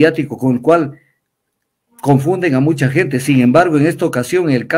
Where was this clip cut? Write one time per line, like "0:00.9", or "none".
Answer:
none